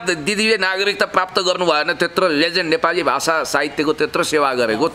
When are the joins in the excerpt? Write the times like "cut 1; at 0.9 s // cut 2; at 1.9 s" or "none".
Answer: none